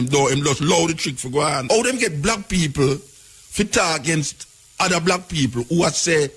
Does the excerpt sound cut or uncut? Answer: cut